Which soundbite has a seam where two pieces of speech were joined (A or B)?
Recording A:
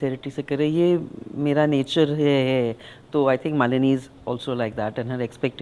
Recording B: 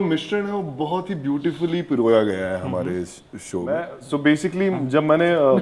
B